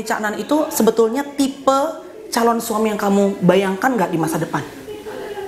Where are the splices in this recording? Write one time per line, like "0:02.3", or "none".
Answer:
none